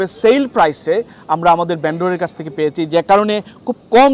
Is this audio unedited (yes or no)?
yes